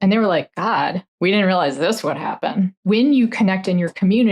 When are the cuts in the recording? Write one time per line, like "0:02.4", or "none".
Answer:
0:01.1
0:02.8